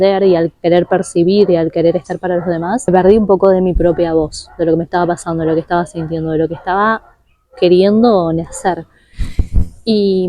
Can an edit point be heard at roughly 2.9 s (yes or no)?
yes